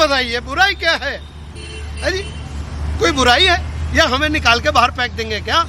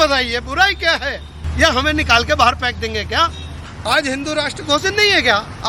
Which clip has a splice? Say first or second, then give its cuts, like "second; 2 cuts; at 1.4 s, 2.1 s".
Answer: second; 2 cuts; at 1.4 s, 3.7 s